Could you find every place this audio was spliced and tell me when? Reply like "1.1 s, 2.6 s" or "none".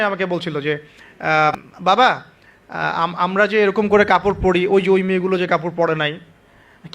1.5 s